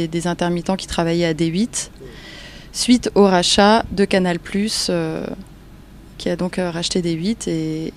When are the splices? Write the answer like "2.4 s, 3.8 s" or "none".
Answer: 1.8 s